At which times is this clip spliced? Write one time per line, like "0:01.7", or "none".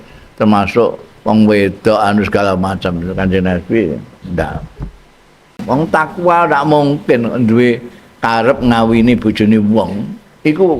0:05.6